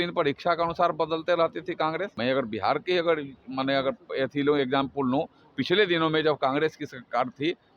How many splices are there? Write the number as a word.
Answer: one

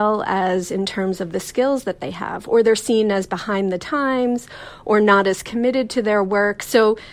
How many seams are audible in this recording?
zero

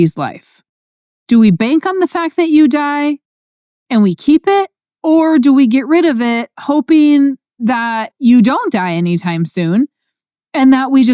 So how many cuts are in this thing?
zero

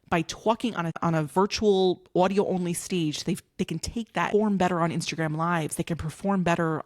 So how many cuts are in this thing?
two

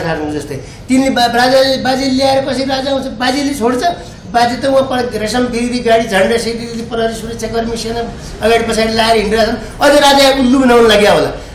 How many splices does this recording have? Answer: zero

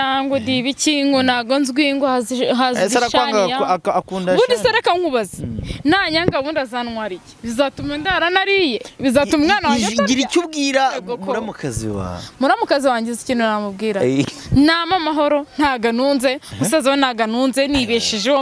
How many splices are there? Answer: zero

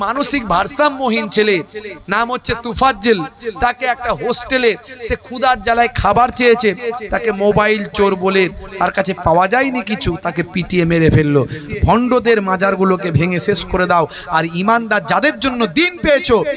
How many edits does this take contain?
one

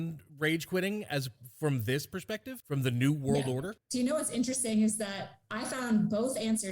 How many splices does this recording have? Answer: two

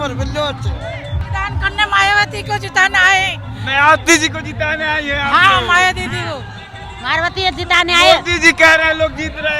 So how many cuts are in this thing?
one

